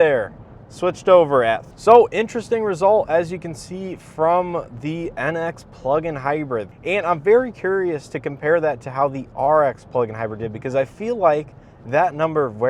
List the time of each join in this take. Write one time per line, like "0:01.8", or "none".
0:01.7
0:06.7